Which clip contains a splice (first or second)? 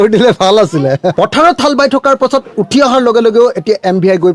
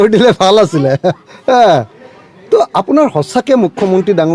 first